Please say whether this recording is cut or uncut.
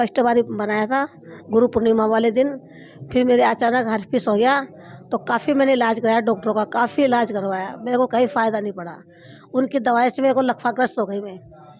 uncut